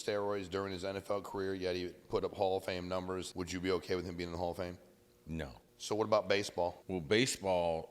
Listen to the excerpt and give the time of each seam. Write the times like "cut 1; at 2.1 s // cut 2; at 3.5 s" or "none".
cut 1; at 3.3 s // cut 2; at 5.6 s // cut 3; at 6.8 s